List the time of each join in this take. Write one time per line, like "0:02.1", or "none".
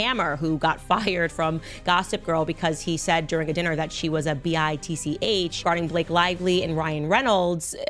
0:05.5